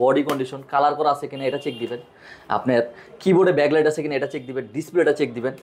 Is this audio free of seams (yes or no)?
yes